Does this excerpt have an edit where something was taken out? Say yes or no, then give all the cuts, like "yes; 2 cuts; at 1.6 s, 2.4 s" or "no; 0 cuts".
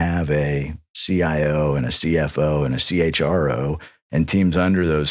no; 0 cuts